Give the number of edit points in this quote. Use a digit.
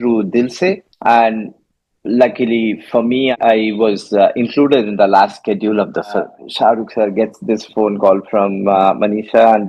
2